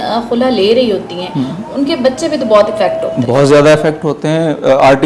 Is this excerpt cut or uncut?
uncut